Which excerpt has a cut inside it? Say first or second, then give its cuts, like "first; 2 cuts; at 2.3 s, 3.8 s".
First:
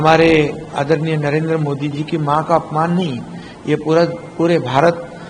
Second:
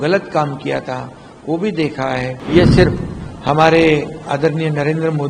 second; 1 cut; at 2.3 s